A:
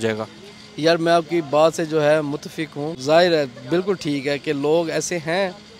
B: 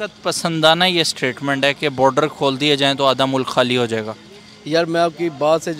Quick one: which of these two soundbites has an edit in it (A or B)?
A